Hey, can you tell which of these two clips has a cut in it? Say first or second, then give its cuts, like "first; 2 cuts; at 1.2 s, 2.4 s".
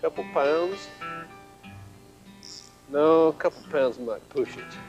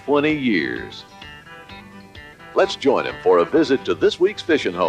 second; 1 cut; at 3.5 s